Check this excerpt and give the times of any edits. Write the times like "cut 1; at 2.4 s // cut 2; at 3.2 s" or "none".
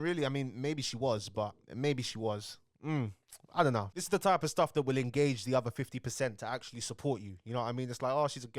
none